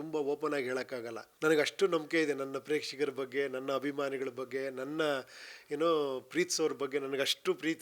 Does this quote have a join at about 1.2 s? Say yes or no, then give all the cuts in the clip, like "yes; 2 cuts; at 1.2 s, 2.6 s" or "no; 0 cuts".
yes; 1 cut; at 1.2 s